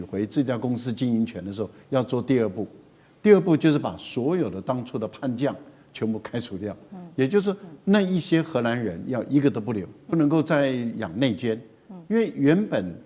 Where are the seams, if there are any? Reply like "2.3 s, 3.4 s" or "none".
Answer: 10.1 s